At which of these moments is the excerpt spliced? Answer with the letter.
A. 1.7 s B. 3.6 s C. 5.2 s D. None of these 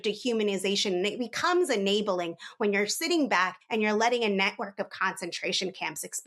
D